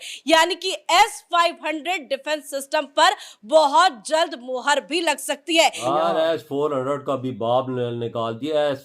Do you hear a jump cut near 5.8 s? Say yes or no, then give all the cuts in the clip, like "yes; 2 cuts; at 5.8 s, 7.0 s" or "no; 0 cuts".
yes; 1 cut; at 5.8 s